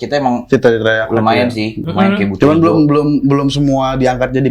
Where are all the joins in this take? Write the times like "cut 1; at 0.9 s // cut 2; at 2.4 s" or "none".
cut 1; at 1.8 s